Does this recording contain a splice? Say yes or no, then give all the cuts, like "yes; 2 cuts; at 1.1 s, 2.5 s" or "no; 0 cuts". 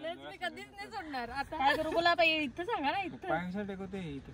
yes; 1 cut; at 1.5 s